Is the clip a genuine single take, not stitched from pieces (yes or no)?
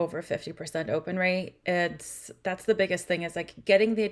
yes